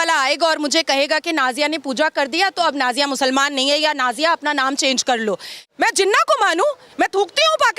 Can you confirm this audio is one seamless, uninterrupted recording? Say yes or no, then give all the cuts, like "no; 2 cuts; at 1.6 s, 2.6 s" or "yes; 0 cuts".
no; 1 cut; at 5.6 s